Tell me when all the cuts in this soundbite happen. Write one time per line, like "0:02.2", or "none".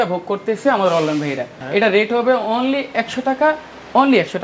0:01.5